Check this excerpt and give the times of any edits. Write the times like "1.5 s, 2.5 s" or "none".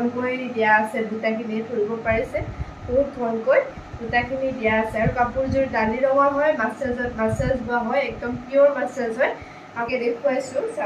9.9 s